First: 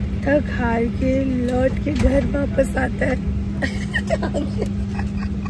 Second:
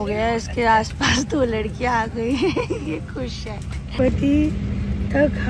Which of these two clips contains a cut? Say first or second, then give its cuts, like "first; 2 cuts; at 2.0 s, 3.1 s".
second; 1 cut; at 3.9 s